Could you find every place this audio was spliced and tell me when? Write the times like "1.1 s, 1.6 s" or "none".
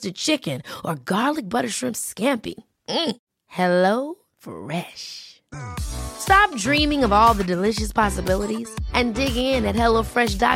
none